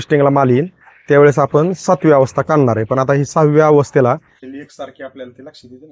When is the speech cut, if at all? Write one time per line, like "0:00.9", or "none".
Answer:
none